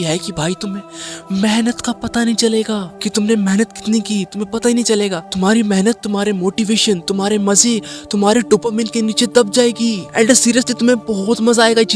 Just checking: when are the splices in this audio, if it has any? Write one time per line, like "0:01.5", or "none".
0:03.0
0:05.2
0:10.0